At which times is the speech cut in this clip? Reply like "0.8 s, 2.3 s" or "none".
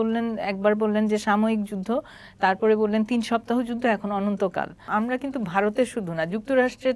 4.8 s

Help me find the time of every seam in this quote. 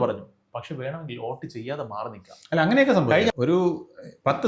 3.3 s

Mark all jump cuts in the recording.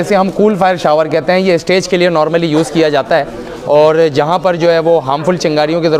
none

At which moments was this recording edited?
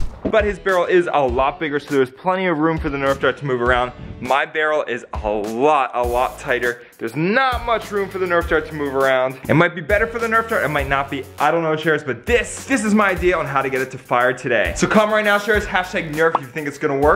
none

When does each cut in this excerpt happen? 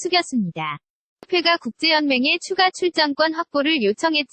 1.2 s

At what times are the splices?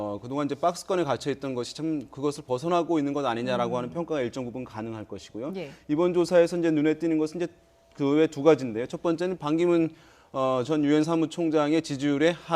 6.9 s

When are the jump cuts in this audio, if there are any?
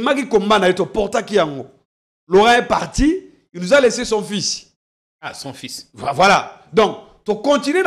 none

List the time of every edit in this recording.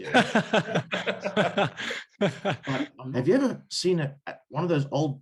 3.0 s

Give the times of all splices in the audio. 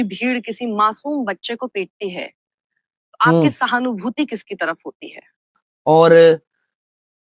5.6 s

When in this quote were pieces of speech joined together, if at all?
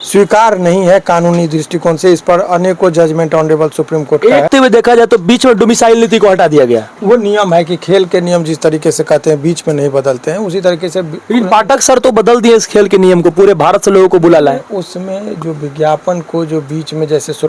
4.5 s

